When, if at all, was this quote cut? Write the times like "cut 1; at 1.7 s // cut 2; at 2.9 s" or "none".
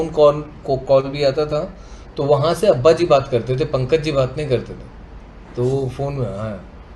none

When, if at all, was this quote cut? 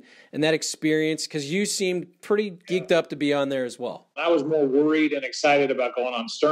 cut 1; at 4.2 s

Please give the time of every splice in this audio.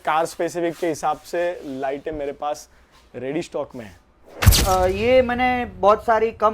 cut 1; at 4.5 s

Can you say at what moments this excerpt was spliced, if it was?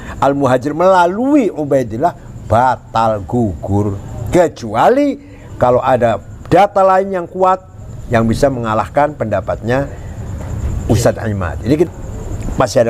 cut 1; at 11.9 s

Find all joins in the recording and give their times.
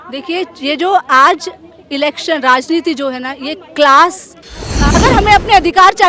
cut 1; at 4.8 s

